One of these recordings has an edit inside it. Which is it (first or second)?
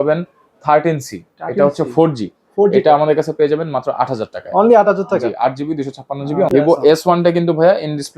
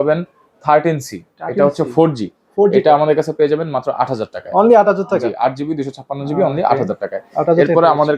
first